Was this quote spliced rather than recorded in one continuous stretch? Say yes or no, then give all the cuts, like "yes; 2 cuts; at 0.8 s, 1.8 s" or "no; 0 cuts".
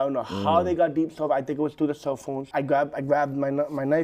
yes; 1 cut; at 2.5 s